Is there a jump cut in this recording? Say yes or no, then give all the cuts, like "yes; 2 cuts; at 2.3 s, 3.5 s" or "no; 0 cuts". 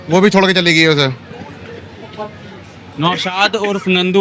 no; 0 cuts